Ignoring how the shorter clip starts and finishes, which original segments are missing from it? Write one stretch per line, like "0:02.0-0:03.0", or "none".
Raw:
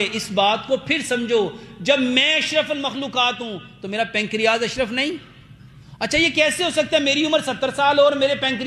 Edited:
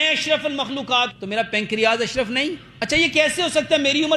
0:03.4-0:03.8
0:05.3-0:05.9